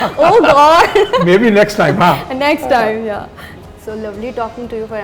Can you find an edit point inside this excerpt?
no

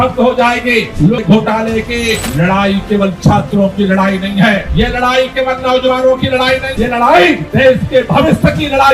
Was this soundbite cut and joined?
yes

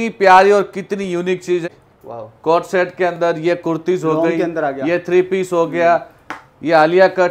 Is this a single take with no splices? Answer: no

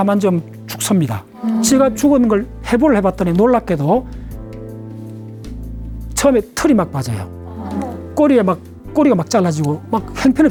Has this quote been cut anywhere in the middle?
no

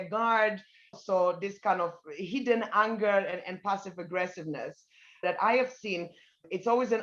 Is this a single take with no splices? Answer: no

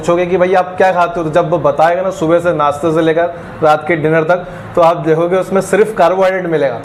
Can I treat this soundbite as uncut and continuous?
yes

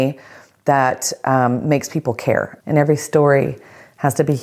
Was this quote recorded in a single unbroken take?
no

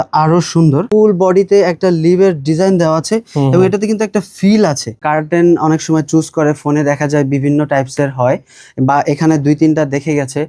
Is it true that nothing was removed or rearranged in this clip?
no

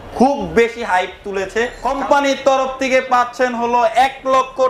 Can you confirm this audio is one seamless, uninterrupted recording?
no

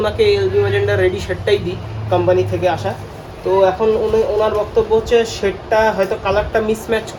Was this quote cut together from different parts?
no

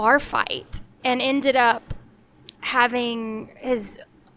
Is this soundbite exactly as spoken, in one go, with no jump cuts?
yes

